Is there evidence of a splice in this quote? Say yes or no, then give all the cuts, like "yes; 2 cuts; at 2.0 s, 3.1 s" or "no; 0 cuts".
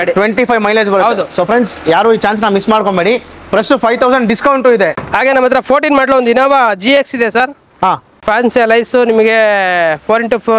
yes; 2 cuts; at 5.0 s, 8.2 s